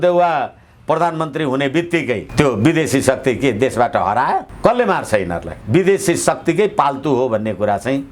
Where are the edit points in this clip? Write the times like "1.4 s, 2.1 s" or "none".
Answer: 4.5 s, 5.5 s